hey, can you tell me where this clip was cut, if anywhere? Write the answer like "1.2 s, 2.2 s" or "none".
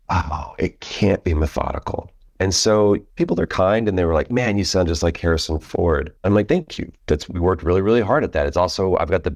2.2 s, 3.1 s, 6.1 s

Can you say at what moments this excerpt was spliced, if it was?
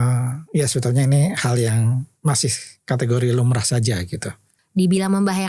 4.5 s

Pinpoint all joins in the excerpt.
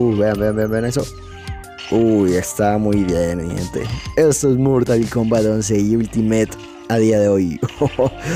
none

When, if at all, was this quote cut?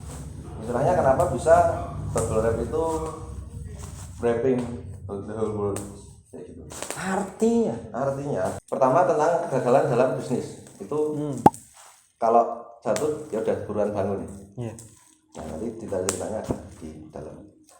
8.6 s

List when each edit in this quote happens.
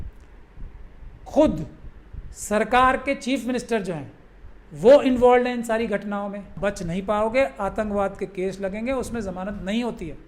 6.5 s

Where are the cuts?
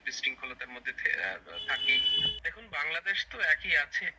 2.1 s

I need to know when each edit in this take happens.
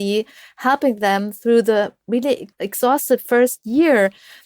2.6 s

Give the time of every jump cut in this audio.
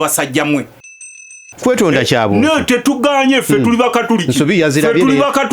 1.1 s

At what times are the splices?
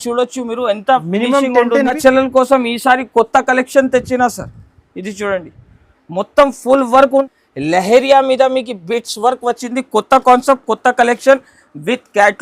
2.0 s, 7.3 s

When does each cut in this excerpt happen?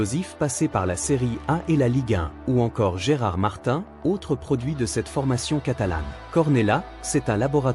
2.3 s, 6.1 s

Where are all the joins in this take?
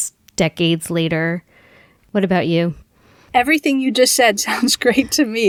none

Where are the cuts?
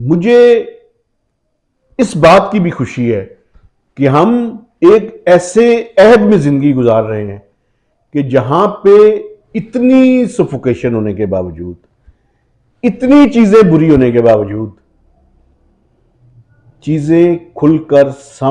none

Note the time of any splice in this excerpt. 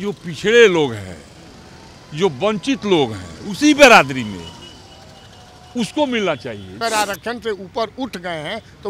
6.8 s

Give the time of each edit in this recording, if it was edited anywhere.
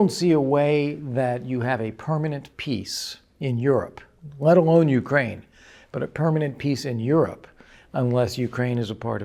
none

